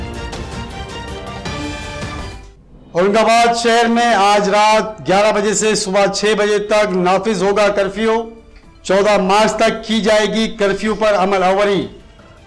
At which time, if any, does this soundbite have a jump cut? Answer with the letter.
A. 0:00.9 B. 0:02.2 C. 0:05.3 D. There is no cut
B